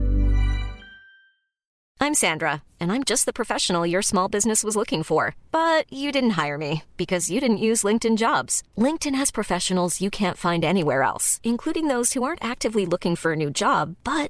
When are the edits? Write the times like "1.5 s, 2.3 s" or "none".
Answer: 1.8 s